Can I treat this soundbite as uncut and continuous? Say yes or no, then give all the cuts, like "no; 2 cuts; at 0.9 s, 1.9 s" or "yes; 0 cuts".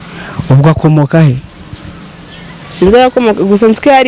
yes; 0 cuts